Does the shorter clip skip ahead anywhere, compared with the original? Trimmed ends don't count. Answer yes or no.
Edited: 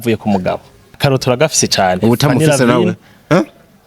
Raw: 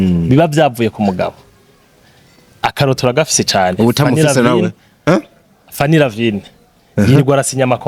yes